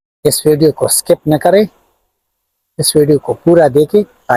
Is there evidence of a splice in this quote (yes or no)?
no